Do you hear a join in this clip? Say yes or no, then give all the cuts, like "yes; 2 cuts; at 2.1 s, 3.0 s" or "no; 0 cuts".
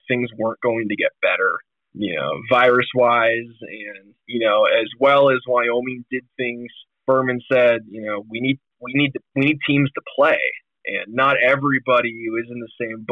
yes; 2 cuts; at 1.9 s, 7.0 s